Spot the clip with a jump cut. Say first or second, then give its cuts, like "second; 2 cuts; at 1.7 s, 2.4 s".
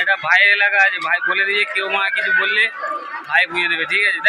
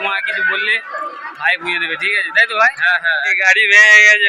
second; 1 cut; at 3.3 s